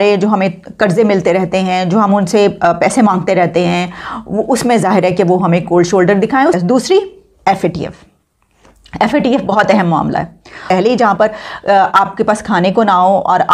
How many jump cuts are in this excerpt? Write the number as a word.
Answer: two